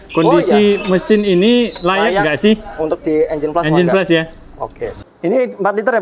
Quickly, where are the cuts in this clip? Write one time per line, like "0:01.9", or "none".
0:04.9